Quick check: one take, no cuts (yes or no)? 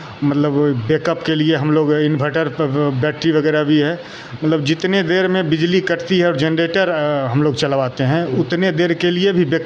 yes